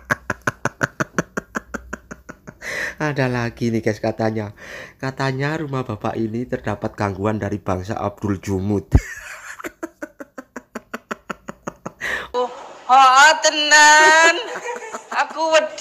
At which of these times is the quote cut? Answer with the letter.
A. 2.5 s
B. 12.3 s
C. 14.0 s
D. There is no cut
B